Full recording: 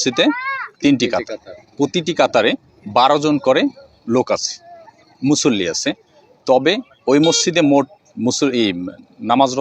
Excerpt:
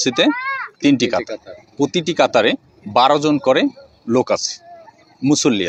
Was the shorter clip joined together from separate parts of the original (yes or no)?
no